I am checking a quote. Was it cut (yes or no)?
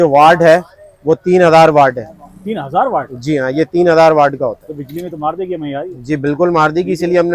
no